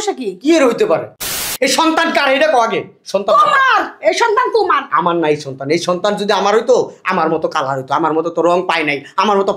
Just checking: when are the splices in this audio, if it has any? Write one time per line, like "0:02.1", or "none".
0:01.3